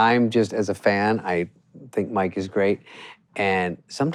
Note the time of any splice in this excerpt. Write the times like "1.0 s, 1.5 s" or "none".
none